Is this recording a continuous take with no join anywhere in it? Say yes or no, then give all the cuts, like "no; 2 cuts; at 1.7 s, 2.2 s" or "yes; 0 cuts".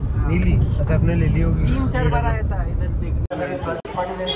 no; 1 cut; at 3.3 s